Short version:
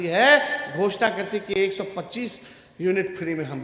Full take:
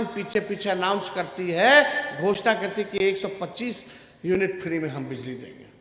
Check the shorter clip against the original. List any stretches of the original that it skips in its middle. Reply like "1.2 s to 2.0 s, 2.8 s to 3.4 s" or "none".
none